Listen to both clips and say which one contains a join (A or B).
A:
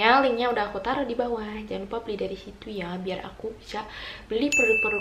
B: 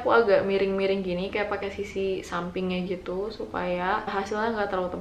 B